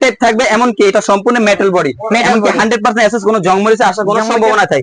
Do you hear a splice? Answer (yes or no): no